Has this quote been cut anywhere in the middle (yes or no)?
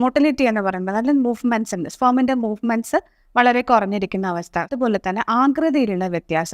yes